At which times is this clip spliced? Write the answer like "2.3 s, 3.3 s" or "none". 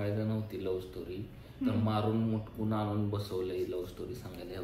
none

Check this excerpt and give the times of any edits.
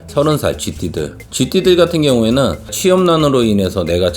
2.7 s

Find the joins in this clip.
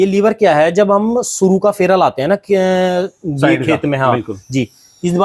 none

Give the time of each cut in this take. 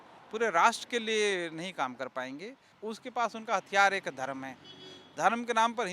2.7 s

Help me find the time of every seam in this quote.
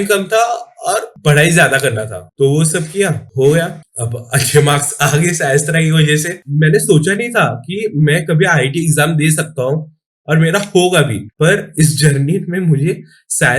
6.4 s

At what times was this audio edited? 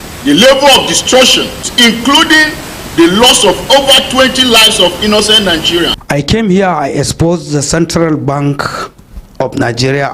1.7 s, 6.1 s

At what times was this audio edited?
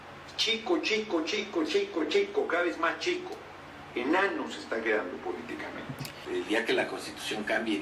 6.1 s

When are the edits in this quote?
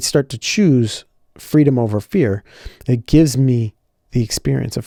none

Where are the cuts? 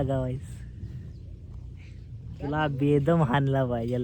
none

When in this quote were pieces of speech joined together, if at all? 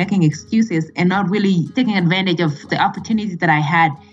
1.7 s, 2.7 s

